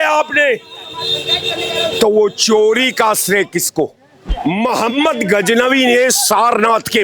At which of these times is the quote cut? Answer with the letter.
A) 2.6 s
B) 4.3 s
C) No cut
B